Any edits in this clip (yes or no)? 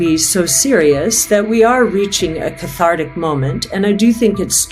no